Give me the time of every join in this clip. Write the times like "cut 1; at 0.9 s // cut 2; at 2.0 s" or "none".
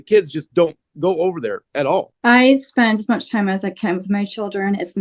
cut 1; at 2.1 s